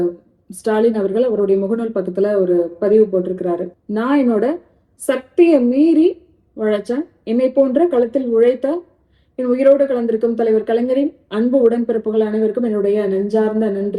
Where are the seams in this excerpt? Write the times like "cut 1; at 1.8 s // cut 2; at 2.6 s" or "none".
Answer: cut 1; at 3.7 s